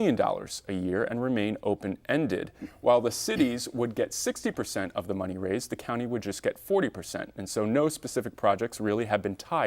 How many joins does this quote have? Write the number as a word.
one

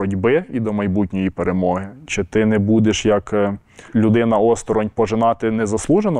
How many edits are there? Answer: one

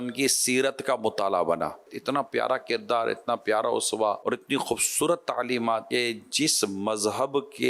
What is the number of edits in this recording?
three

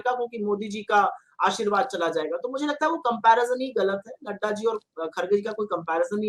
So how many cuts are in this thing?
zero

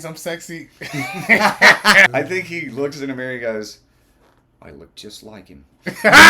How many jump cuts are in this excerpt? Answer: one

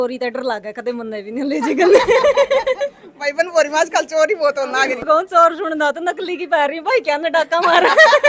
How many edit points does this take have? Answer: one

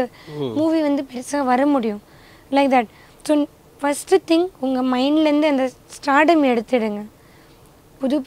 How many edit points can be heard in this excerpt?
zero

